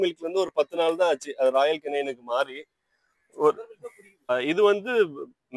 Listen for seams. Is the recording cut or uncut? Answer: cut